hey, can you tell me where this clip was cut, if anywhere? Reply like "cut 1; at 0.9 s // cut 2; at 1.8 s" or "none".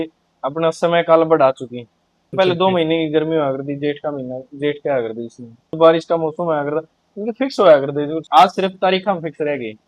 cut 1; at 2.3 s // cut 2; at 5.7 s // cut 3; at 8.2 s